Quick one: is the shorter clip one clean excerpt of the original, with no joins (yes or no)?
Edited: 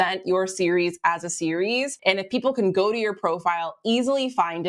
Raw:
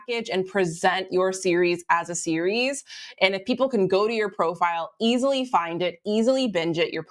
no